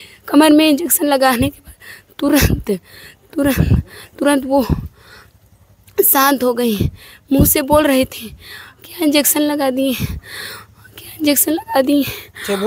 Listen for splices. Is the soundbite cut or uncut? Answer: uncut